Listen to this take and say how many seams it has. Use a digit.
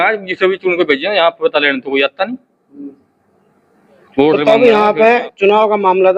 1